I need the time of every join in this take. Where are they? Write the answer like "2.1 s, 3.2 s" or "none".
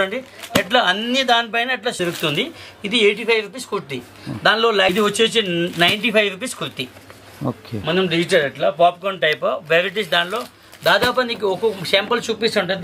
2.0 s, 4.9 s